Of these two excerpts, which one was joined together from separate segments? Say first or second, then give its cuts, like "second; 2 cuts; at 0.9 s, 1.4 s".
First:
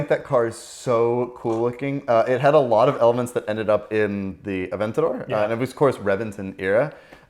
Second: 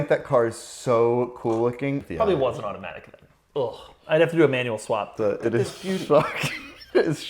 second; 2 cuts; at 2.0 s, 5.1 s